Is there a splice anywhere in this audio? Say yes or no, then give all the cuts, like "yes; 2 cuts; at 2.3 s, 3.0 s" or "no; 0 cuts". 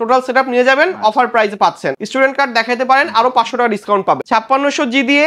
yes; 2 cuts; at 1.9 s, 4.2 s